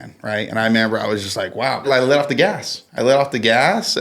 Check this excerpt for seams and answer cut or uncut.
cut